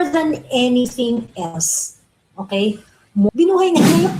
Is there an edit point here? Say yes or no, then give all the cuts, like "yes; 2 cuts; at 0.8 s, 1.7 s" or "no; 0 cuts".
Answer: yes; 1 cut; at 3.3 s